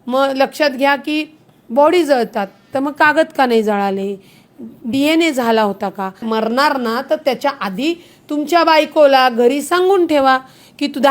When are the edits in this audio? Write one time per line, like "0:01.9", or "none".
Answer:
0:06.2